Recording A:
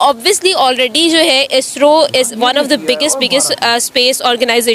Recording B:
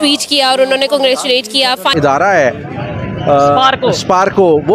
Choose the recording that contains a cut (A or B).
B